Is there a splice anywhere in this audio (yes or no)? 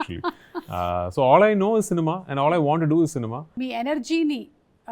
yes